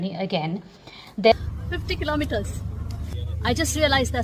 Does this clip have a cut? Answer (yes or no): yes